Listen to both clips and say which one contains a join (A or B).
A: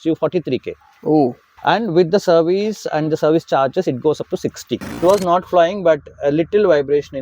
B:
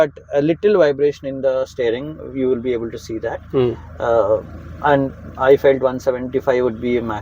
A